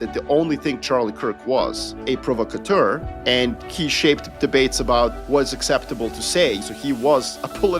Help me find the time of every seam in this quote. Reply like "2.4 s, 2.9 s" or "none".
1.9 s, 3.4 s, 5.2 s, 6.6 s